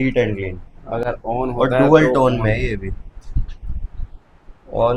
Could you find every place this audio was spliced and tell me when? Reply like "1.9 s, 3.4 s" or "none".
none

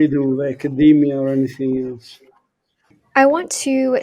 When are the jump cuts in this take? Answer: none

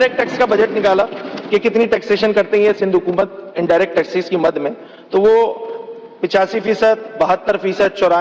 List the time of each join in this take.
none

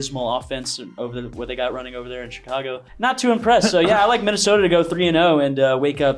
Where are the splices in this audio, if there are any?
2.9 s

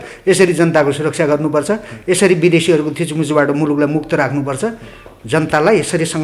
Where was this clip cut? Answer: none

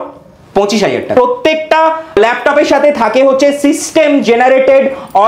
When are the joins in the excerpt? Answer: 1.1 s, 2.2 s

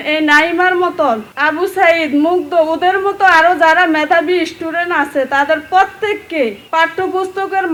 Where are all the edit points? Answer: none

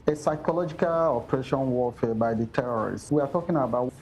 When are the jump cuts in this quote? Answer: 3.0 s

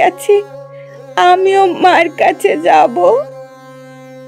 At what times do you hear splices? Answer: 3.2 s

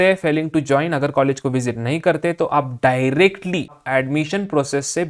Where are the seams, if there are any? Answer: 3.8 s

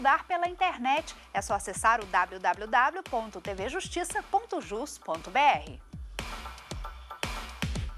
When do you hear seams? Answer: 5.9 s

